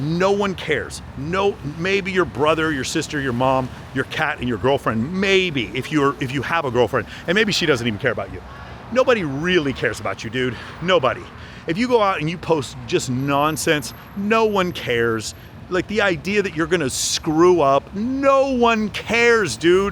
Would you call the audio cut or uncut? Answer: uncut